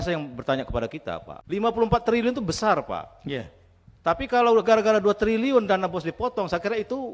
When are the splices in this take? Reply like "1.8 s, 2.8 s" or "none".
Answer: 1.3 s